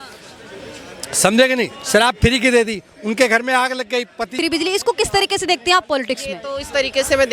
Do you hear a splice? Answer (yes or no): yes